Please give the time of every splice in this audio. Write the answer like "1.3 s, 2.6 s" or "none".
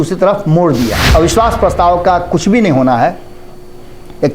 1.0 s

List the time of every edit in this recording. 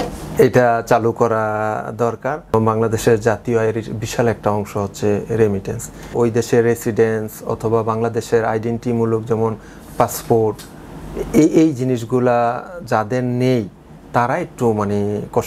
2.5 s, 6.1 s

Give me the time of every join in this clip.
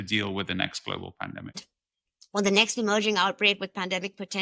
1.6 s

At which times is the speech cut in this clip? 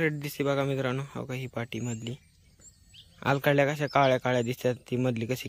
none

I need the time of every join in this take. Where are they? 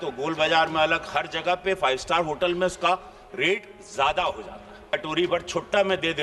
4.9 s

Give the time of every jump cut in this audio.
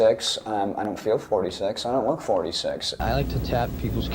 3.0 s

